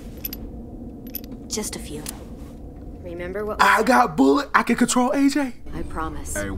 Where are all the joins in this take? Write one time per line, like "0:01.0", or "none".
0:05.6